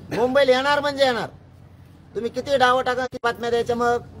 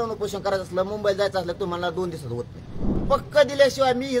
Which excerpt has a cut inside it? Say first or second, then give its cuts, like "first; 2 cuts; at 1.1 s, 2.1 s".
second; 1 cut; at 3.0 s